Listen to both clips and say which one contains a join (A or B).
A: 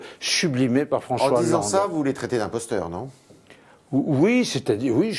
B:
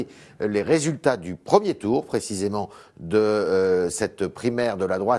B